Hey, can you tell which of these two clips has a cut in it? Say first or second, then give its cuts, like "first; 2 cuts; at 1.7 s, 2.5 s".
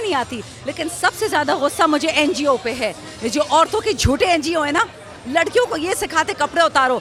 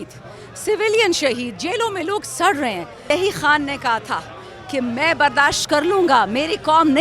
second; 1 cut; at 3.0 s